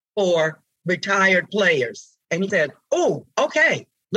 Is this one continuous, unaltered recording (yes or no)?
no